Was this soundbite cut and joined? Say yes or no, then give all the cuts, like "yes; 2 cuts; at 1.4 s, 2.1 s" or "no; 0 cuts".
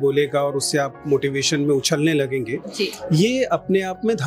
no; 0 cuts